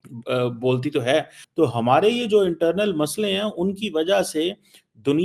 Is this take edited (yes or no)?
yes